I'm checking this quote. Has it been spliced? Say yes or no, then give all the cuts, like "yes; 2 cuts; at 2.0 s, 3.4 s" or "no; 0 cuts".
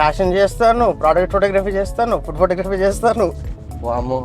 no; 0 cuts